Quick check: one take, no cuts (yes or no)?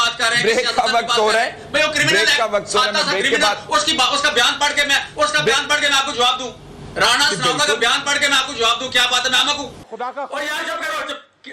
no